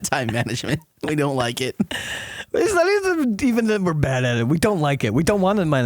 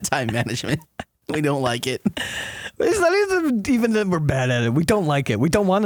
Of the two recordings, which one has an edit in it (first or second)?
first